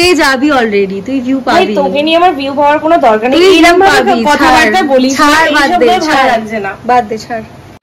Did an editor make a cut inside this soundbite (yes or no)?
no